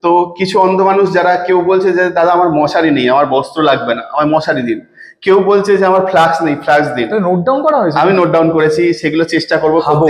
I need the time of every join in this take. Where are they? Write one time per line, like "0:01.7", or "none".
none